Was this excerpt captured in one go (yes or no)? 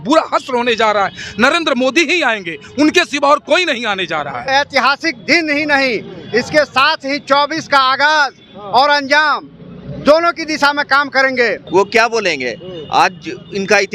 no